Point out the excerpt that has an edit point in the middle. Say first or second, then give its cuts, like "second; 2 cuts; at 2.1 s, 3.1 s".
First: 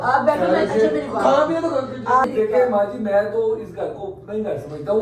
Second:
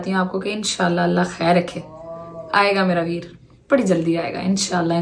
first; 1 cut; at 2.3 s